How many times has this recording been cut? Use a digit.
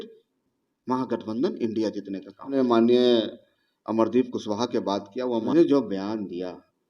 2